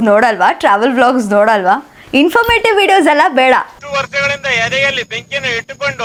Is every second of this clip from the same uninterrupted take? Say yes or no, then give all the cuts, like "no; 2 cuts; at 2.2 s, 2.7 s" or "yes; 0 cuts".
yes; 0 cuts